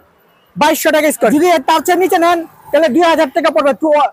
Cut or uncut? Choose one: cut